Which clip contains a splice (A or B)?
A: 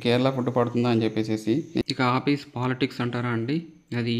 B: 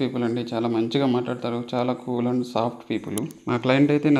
A